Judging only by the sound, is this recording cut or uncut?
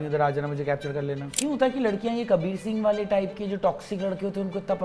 cut